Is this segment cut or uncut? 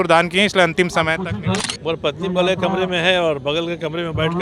cut